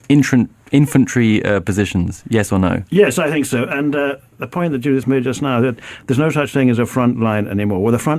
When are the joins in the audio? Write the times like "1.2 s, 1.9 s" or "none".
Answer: 6.8 s